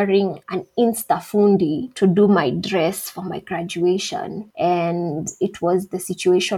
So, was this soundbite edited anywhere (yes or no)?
no